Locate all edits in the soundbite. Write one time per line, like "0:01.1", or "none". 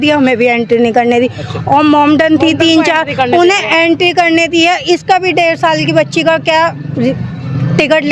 none